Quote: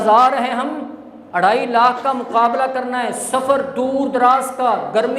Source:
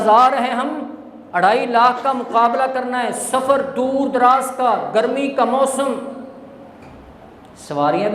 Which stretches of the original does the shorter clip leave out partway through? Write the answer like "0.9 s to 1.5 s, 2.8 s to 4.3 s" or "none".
none

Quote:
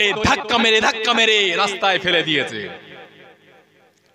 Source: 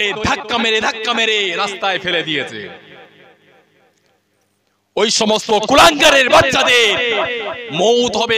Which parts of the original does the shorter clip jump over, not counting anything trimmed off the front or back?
none

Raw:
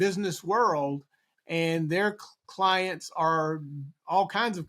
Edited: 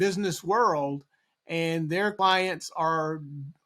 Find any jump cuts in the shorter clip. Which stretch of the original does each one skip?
2.1 s to 2.5 s

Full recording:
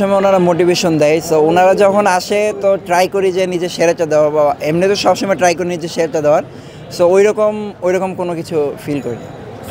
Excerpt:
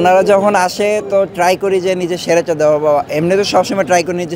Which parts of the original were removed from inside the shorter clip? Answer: none

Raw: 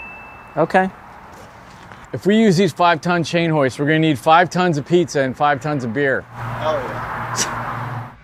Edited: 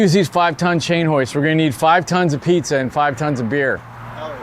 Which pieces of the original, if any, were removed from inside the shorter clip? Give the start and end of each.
none

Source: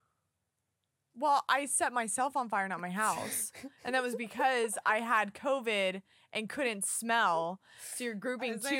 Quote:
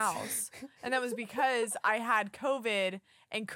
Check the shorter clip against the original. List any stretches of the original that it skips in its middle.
none

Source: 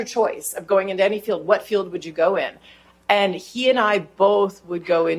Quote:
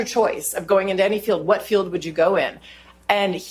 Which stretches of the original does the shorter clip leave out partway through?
none

